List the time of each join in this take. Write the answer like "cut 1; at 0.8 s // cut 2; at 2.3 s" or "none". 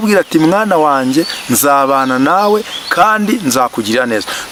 none